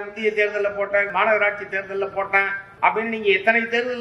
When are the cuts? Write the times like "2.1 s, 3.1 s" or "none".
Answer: 1.1 s, 2.6 s